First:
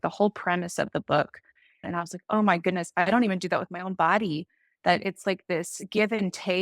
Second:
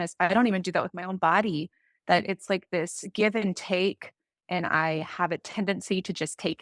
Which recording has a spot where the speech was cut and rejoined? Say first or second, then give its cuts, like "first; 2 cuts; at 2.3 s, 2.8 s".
first; 1 cut; at 1.9 s